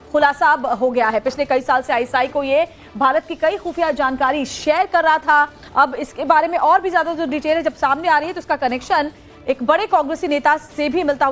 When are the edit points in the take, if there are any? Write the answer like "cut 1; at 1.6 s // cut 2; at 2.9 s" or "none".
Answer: none